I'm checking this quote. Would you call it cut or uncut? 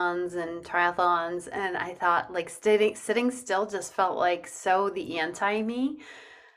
uncut